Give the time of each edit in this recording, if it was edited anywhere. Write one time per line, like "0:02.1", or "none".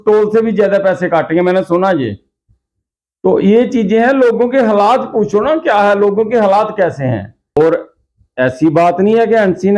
0:07.6